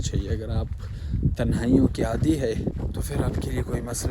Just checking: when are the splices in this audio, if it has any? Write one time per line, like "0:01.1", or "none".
0:02.7